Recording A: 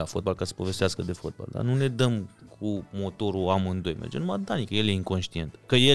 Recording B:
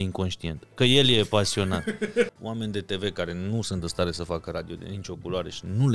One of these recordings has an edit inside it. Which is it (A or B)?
B